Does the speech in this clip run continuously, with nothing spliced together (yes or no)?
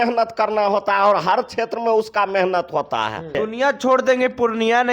no